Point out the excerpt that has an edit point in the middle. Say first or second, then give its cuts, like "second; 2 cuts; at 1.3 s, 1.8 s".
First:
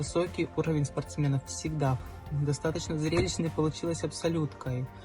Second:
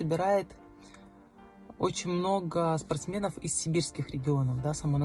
first; 1 cut; at 2.1 s